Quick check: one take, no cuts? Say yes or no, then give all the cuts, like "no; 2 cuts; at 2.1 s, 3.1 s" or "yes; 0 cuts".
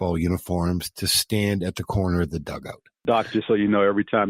no; 1 cut; at 3.0 s